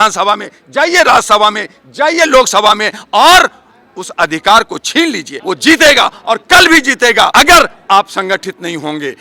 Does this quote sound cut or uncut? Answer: cut